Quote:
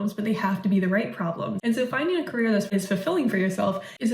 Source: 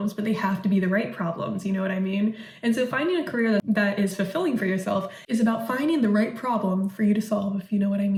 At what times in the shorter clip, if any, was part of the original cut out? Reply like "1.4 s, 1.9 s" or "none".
1.6 s, 2.7 s